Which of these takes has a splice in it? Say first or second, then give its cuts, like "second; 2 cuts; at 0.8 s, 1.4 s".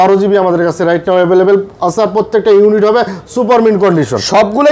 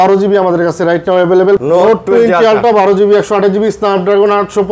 second; 1 cut; at 1.6 s